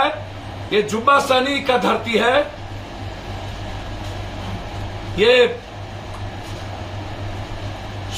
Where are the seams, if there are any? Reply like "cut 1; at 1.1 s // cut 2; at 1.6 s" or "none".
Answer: none